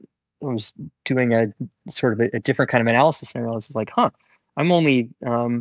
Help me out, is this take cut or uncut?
uncut